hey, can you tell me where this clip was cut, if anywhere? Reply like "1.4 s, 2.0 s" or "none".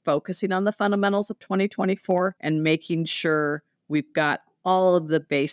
2.4 s